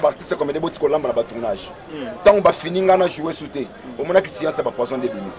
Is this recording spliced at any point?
no; 0 cuts

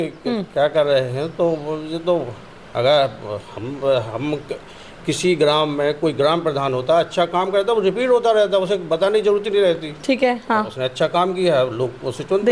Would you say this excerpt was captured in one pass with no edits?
yes; 0 cuts

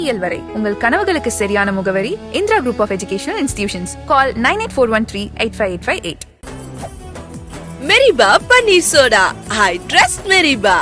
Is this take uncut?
no; 1 cut; at 6.3 s

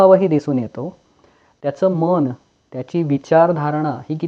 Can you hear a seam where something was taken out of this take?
no; 0 cuts

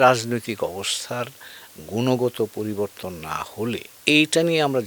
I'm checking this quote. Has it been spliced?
yes; 1 cut; at 3.9 s

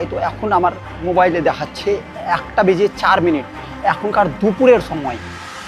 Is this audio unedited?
no; 1 cut; at 1.0 s

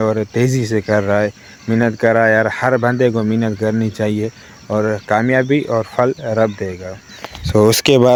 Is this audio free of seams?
yes; 0 cuts

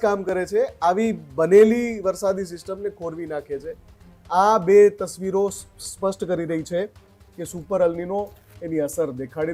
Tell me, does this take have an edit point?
no; 0 cuts

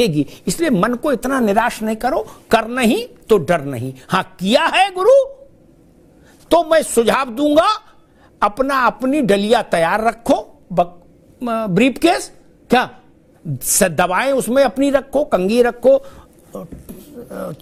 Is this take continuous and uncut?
yes; 0 cuts

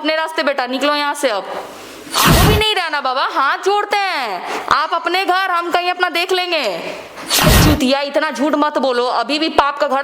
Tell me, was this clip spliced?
yes; 2 cuts; at 2.3 s, 7.4 s

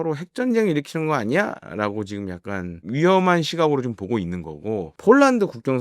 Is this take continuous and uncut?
no; 2 cuts; at 2.8 s, 4.9 s

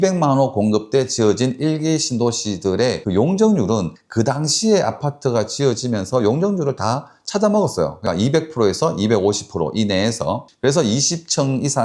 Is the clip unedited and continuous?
yes; 0 cuts

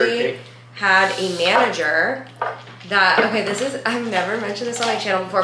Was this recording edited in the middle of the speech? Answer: no; 0 cuts

